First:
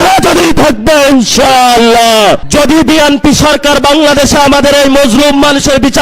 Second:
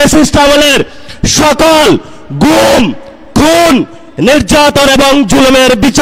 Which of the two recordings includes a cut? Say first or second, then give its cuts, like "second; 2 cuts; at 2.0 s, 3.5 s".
first; 1 cut; at 2.4 s